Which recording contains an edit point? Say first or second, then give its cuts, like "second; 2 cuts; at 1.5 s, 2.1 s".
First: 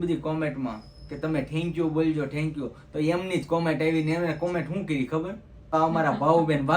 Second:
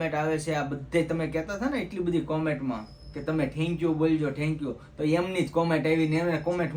first; 1 cut; at 5.7 s